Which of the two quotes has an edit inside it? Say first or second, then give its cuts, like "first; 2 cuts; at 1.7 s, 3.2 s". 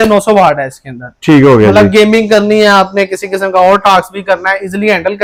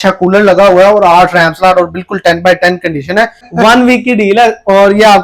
second; 1 cut; at 3.4 s